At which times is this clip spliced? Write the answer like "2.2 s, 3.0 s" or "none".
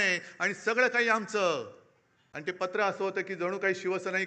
2.5 s